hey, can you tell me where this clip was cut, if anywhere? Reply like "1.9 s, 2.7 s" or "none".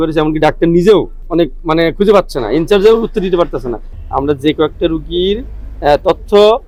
none

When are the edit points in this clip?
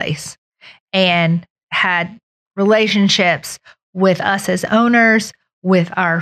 none

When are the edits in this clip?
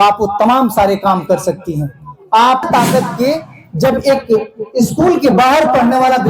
2.7 s

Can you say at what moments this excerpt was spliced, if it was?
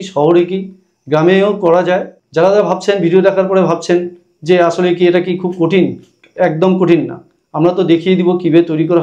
2.2 s

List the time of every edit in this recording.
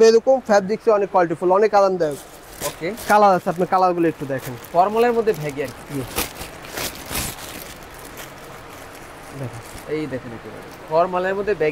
none

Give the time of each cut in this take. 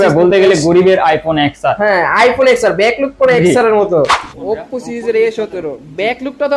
4.3 s

